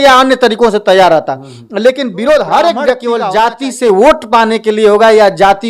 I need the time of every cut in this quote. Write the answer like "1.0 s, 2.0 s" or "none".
3.0 s